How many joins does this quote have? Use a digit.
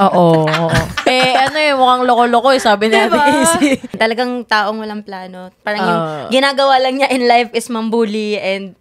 1